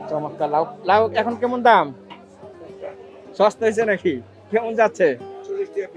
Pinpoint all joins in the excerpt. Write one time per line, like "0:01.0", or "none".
none